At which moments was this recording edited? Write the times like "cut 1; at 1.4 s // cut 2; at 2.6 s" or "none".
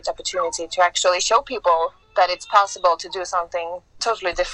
none

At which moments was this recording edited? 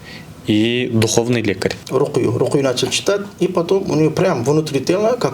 cut 1; at 1.8 s

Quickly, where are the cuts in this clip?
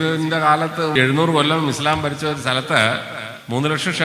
cut 1; at 0.9 s

